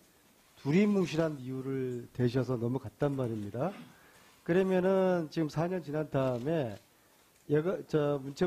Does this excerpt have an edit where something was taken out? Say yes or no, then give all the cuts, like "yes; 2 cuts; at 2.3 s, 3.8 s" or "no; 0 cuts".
no; 0 cuts